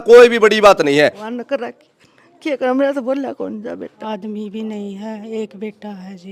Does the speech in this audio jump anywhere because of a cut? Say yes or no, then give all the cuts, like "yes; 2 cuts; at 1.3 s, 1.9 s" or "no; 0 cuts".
yes; 2 cuts; at 1.3 s, 4.0 s